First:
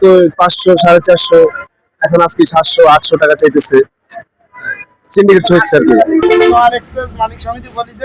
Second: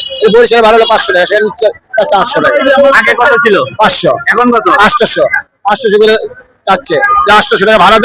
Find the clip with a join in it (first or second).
first